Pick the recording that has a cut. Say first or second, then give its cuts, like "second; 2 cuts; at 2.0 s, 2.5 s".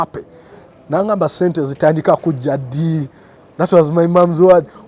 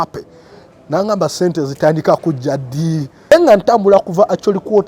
second; 1 cut; at 3.3 s